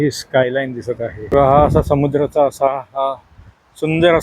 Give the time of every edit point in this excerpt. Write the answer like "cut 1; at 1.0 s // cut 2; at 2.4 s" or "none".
cut 1; at 1.3 s